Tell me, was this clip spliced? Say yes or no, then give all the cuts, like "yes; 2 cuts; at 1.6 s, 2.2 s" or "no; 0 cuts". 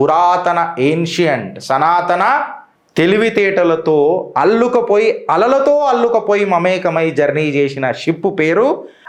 no; 0 cuts